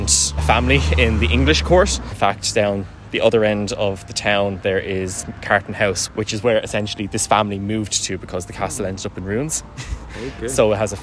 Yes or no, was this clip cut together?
no